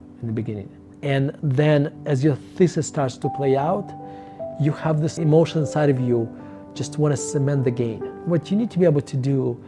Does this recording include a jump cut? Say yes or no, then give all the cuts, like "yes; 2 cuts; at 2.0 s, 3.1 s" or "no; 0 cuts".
yes; 1 cut; at 8.1 s